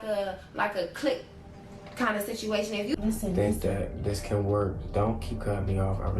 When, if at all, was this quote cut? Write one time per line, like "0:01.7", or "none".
0:03.0